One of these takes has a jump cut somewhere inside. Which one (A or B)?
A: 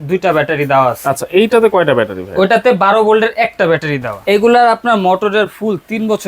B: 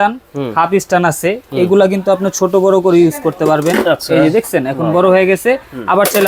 A